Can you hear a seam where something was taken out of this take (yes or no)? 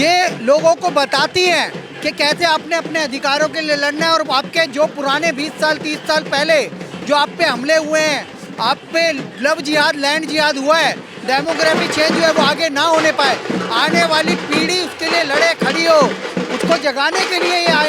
no